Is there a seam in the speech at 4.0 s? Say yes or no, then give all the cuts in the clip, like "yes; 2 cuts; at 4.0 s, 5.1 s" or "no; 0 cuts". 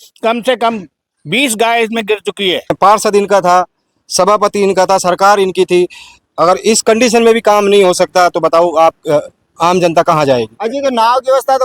no; 2 cuts; at 2.8 s, 10.6 s